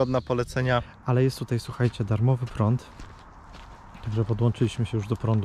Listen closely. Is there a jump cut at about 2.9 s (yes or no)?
no